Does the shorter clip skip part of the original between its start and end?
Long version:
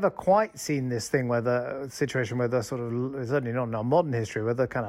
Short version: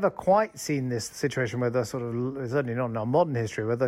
yes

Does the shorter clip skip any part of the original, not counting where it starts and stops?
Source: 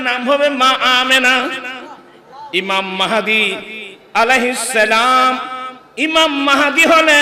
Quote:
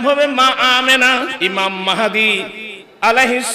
yes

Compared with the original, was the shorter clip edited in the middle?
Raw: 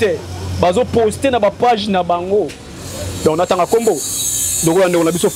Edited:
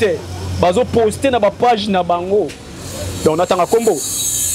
no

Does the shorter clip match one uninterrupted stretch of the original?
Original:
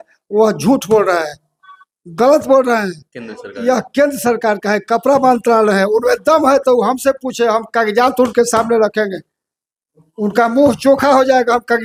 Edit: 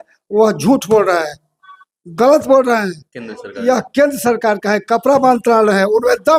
yes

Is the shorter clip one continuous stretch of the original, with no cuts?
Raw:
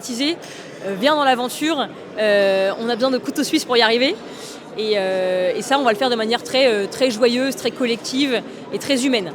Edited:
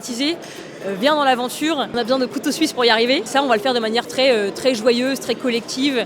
no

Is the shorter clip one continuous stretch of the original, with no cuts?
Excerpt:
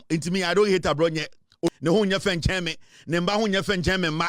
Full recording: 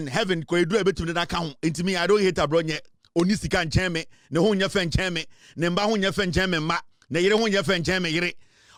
no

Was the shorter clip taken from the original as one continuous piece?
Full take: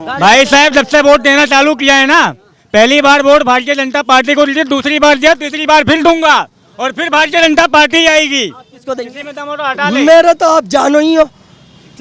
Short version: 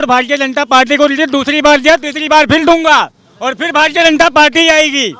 yes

